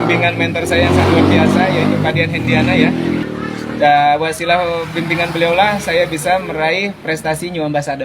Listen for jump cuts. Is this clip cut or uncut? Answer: cut